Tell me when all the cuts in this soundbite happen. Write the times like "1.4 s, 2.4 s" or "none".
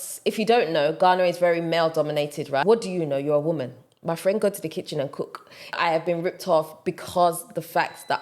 2.6 s, 5.8 s

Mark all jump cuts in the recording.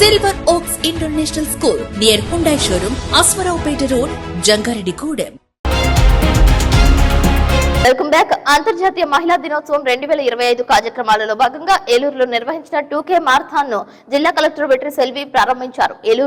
none

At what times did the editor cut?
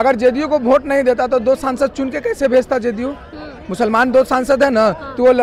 none

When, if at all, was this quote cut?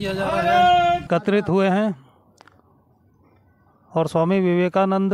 1.1 s

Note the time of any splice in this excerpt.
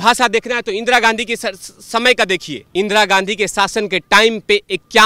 2.6 s

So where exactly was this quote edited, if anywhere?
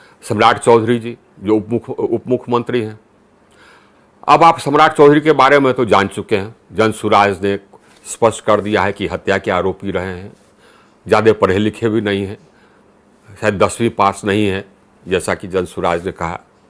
none

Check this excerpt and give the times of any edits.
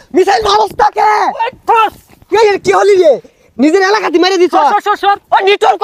none

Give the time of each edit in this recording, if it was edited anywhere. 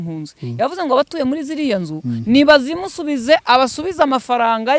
none

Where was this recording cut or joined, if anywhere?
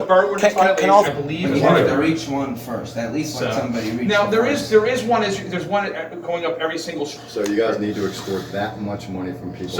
1.1 s, 7.1 s

